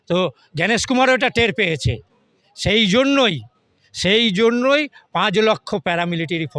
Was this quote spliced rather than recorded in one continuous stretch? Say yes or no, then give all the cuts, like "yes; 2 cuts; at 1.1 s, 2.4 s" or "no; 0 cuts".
no; 0 cuts